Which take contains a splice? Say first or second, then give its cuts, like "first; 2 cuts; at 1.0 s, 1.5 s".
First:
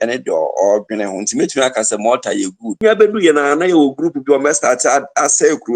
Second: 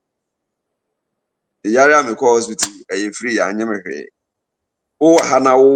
first; 1 cut; at 2.6 s